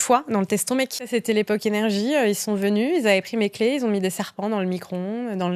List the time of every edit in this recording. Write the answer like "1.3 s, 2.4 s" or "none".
1.1 s